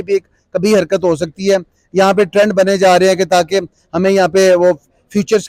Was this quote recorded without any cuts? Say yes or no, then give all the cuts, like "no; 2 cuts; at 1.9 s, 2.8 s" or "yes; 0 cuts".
yes; 0 cuts